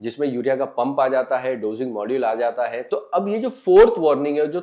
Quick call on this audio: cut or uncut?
cut